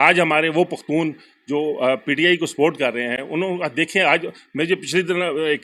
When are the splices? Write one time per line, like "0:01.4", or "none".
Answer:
none

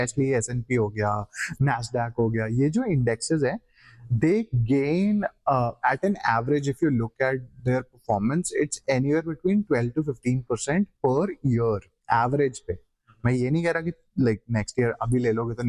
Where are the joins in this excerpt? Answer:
none

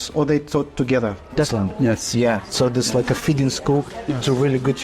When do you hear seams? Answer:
0:01.5

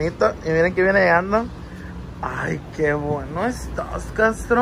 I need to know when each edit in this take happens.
none

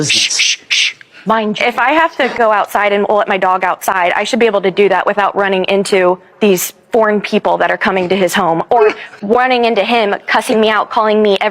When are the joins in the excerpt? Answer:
none

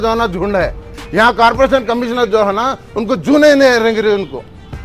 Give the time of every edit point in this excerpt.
0:01.0

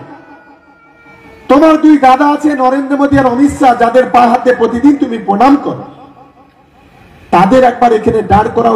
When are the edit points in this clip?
none

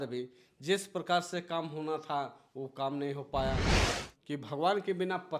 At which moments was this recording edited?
0:03.8

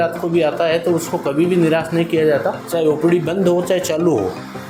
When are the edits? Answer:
none

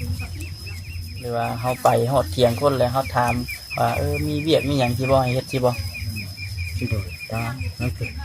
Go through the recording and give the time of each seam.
0:01.1

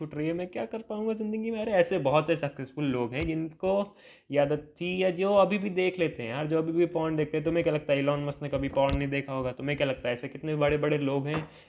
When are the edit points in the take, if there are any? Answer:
none

